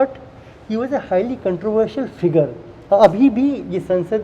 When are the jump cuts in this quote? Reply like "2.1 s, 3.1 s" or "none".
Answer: none